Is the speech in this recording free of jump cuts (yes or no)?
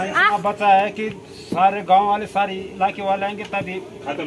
yes